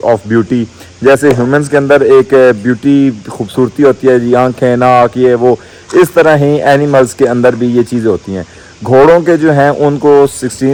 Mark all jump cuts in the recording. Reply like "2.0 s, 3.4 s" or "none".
none